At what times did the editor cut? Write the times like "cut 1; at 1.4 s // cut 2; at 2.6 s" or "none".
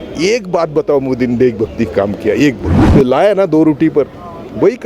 cut 1; at 2.7 s